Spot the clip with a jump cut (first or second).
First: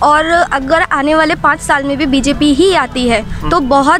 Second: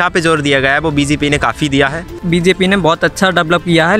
second